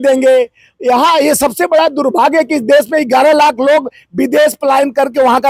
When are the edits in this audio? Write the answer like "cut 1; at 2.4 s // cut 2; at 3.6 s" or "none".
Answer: none